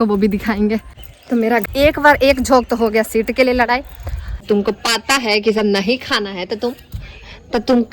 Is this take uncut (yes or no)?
no